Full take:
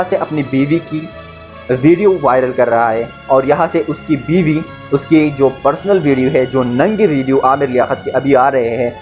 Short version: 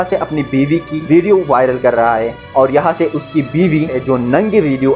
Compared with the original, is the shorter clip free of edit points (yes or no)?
no